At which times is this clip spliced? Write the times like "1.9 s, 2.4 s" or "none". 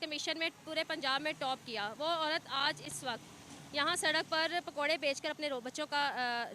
none